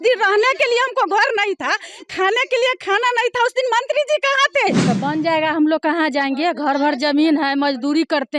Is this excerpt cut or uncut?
cut